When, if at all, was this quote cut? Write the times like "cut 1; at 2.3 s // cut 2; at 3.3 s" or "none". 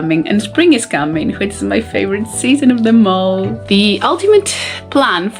cut 1; at 3.6 s